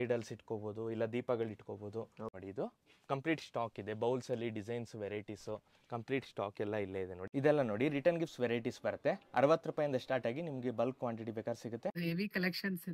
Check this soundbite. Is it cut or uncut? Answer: cut